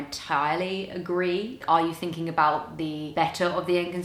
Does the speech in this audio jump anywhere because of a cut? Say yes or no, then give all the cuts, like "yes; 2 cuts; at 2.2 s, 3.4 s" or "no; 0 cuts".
yes; 2 cuts; at 1.6 s, 3.0 s